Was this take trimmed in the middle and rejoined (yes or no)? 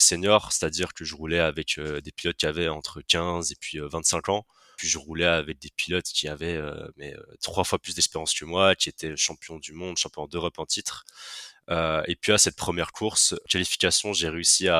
yes